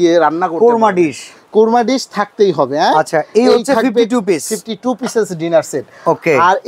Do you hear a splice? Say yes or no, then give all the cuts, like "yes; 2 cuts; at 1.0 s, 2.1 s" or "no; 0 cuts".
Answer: no; 0 cuts